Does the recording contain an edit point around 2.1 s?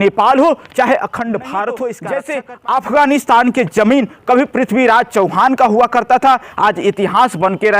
yes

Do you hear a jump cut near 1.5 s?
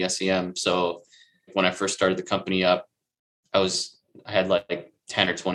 yes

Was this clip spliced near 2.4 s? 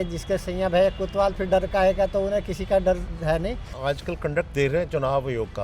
no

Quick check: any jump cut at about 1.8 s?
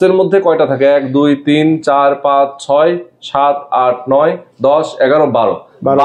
no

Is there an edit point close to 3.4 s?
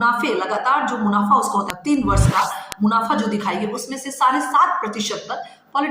no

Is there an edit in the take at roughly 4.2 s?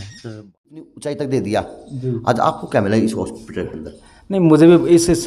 no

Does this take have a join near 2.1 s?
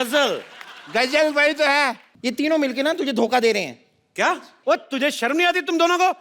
yes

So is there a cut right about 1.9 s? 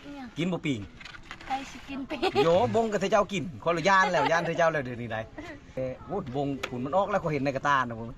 no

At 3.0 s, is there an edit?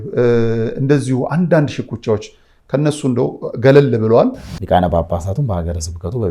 no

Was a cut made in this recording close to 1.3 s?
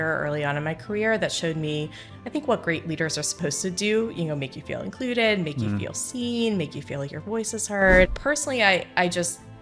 no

